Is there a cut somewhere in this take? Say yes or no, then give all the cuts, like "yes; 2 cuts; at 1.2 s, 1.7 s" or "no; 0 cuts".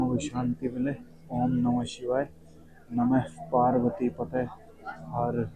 no; 0 cuts